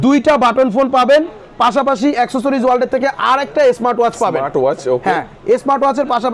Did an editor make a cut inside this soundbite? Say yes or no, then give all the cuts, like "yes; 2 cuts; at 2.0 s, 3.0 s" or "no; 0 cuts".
no; 0 cuts